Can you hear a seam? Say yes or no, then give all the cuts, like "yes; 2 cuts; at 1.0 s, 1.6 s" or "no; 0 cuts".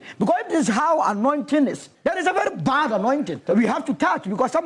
yes; 2 cuts; at 1.9 s, 3.4 s